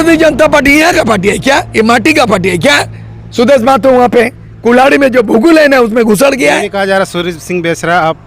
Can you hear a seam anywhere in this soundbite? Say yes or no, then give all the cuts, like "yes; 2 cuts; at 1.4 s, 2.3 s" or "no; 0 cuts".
no; 0 cuts